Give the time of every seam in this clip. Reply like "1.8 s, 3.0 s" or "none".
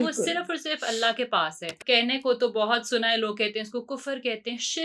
1.8 s